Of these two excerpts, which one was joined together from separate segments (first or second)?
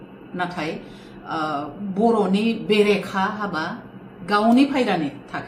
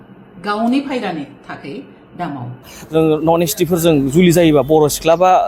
second